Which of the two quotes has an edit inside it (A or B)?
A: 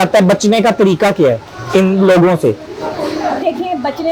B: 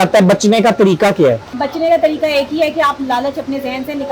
B